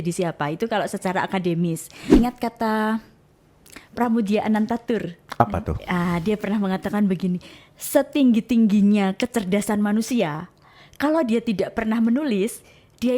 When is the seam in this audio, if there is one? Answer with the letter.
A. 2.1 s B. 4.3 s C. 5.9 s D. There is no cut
A